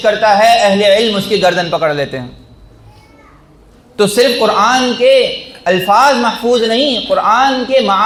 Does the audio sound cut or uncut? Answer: uncut